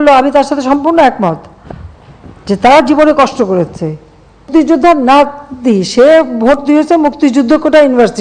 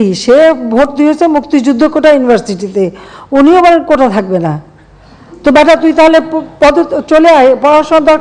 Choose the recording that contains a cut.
first; 1 cut; at 4.5 s

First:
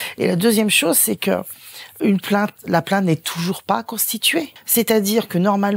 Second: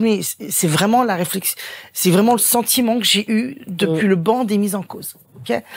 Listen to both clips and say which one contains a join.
first; 2 cuts; at 1.9 s, 4.6 s

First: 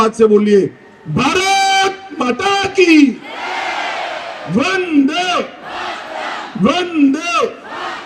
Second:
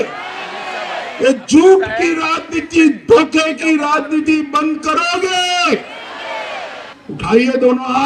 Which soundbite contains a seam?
second; 1 cut; at 6.9 s

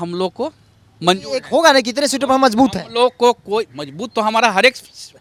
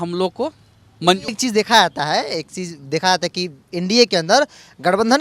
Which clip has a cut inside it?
second; 1 cut; at 1.3 s

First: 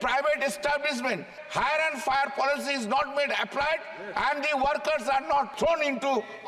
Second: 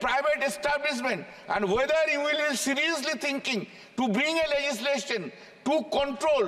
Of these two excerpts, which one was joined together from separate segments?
first; 2 cuts; at 1.3 s, 5.5 s

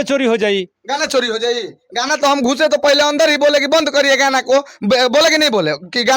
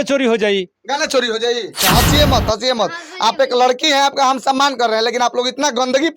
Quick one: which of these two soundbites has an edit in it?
second; 1 cut; at 1.8 s

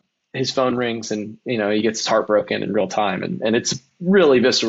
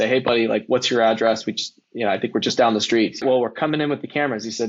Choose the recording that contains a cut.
second; 1 cut; at 3.2 s

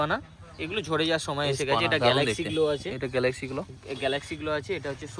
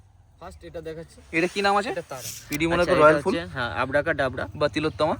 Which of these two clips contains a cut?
second; 1 cut; at 2.4 s

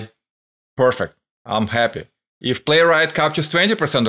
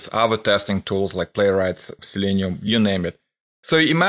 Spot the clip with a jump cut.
second; 1 cut; at 2.0 s

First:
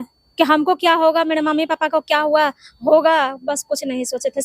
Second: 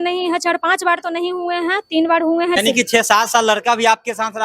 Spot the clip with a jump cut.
second; 1 cut; at 2.6 s

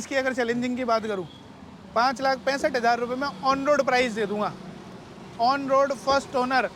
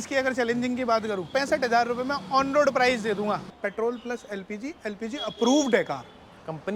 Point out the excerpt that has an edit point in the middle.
second; 2 cuts; at 1.3 s, 3.6 s

